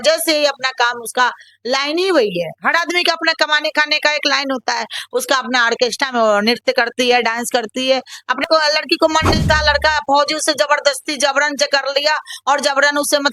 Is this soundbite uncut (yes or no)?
no